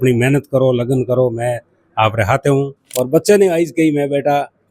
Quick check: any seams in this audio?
yes; 1 cut; at 2.8 s

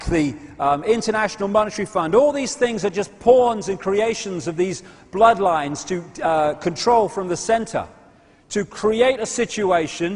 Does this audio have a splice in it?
no; 0 cuts

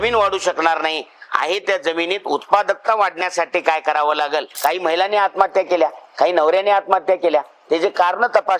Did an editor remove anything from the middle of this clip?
yes; 1 cut; at 4.5 s

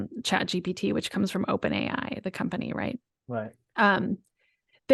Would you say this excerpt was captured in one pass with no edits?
yes; 0 cuts

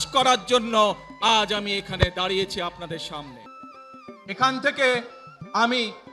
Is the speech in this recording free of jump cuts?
no; 1 cut; at 3.5 s

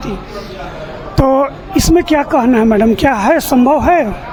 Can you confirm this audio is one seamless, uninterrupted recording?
yes; 0 cuts

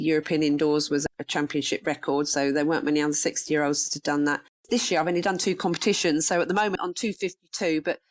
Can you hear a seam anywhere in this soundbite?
yes; 3 cuts; at 1.0 s, 4.5 s, 6.7 s

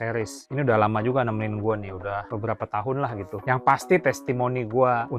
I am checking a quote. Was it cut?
no; 0 cuts

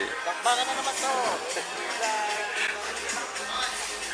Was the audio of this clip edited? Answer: no; 0 cuts

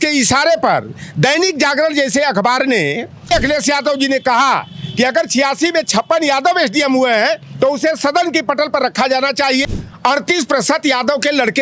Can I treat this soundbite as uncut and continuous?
no; 2 cuts; at 3.3 s, 9.8 s

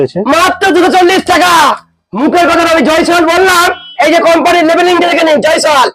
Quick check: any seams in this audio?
yes; 1 cut; at 2.1 s

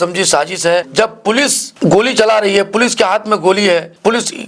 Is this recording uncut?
yes; 0 cuts

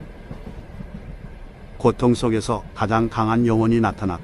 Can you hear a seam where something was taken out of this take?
no; 0 cuts

